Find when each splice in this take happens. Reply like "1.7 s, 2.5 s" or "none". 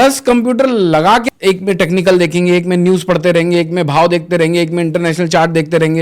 1.2 s